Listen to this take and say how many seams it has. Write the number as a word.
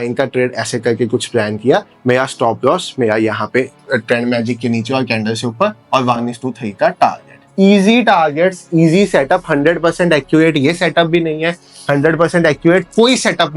zero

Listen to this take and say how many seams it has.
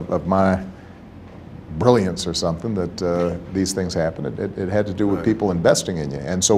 zero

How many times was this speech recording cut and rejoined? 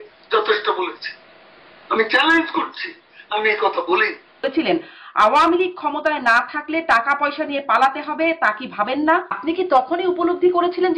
two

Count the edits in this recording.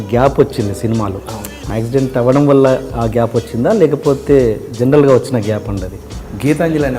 two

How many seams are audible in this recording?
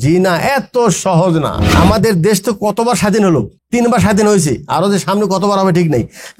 two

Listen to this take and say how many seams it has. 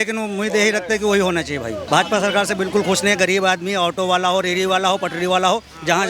one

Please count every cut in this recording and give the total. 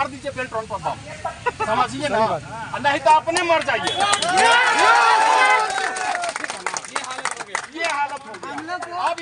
zero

